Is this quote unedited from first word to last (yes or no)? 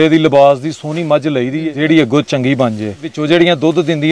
no